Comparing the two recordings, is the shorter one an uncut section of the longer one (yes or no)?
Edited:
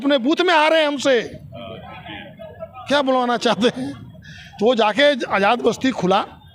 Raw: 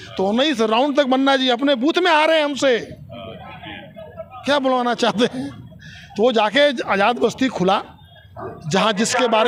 yes